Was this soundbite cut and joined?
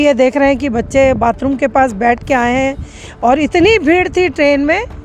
no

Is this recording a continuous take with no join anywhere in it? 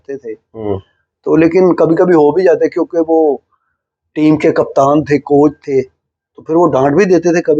yes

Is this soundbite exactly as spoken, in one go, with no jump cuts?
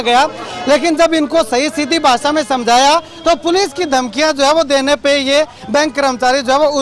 yes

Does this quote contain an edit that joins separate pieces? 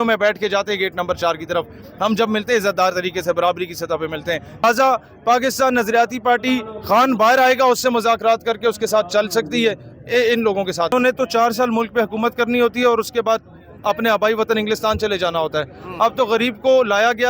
yes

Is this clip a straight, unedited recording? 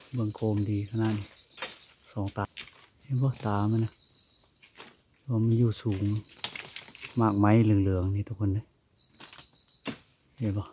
no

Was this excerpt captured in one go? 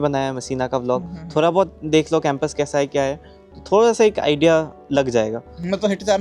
yes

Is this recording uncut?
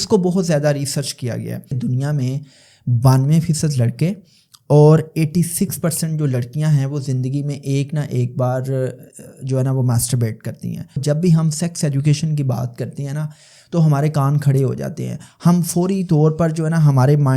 no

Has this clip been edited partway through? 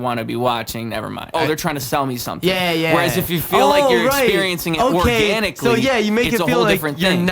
yes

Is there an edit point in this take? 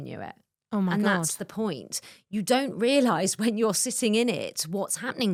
no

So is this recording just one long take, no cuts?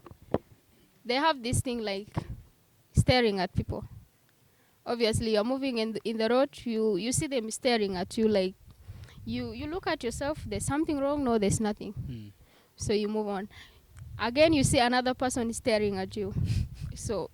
yes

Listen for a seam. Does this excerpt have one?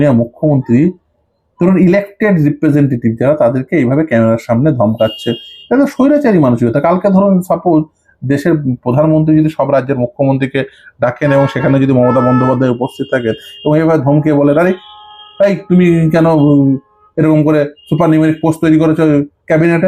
no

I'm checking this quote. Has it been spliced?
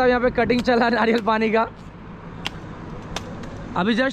no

